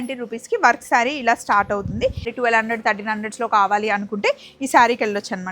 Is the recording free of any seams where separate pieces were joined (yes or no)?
no